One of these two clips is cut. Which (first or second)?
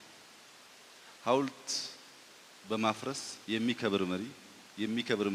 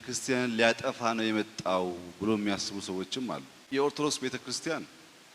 second